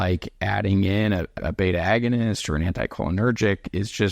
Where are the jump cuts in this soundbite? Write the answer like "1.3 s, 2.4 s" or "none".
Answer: 1.3 s